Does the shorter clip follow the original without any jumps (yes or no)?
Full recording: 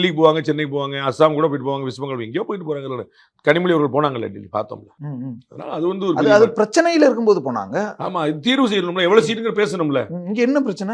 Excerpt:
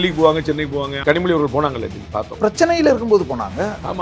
no